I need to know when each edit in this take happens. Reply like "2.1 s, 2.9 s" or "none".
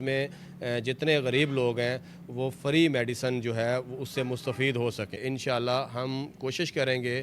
5.2 s